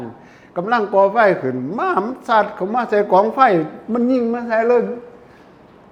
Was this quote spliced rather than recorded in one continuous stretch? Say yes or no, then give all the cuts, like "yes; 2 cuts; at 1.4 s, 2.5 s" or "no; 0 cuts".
no; 0 cuts